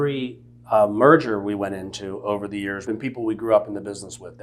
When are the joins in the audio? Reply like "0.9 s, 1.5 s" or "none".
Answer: 2.8 s